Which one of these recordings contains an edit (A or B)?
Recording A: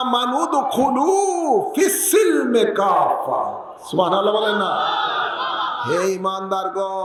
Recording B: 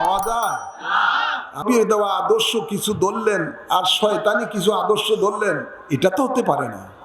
B